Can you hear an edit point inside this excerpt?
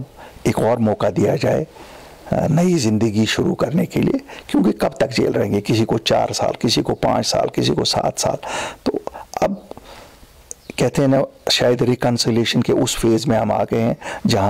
no; 0 cuts

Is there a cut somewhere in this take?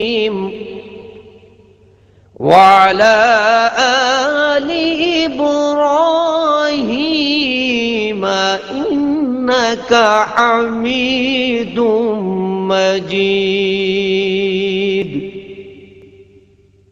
no; 0 cuts

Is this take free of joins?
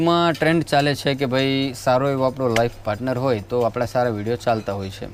yes; 0 cuts

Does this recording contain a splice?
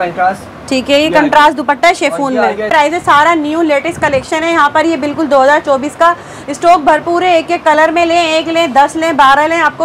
yes; 1 cut; at 2.7 s

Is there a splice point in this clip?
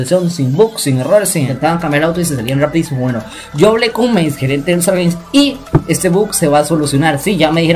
yes; 1 cut; at 1.5 s

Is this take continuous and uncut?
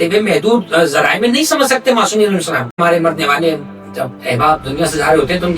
no; 1 cut; at 2.8 s

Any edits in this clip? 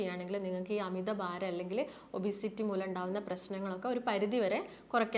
no; 0 cuts

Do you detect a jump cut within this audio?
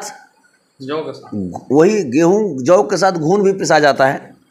no; 0 cuts

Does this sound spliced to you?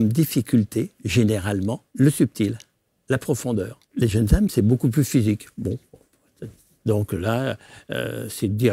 yes; 2 cuts; at 1.8 s, 3.8 s

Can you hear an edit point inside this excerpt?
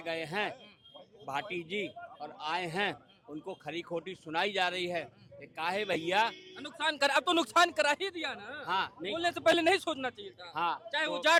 no; 0 cuts

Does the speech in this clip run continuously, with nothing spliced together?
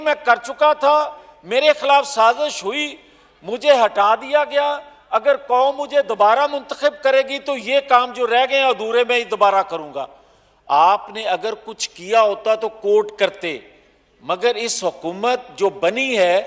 yes; 0 cuts

